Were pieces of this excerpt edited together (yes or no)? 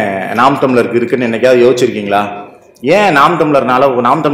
no